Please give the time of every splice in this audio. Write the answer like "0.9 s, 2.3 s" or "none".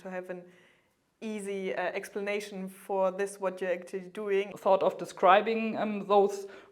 4.5 s